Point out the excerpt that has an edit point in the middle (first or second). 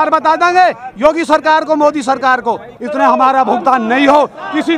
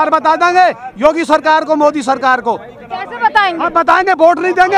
first